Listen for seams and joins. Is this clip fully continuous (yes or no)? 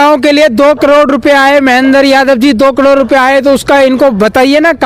yes